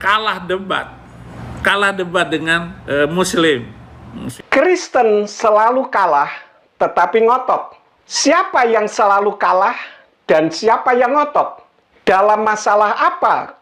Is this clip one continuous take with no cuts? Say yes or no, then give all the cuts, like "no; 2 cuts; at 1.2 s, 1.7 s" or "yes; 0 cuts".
no; 1 cut; at 3.8 s